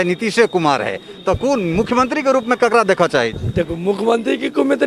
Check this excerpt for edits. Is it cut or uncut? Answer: uncut